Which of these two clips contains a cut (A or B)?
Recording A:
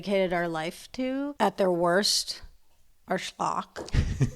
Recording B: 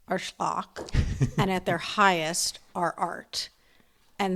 A